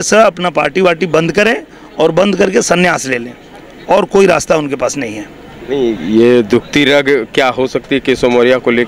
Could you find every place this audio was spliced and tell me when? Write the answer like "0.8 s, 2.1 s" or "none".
none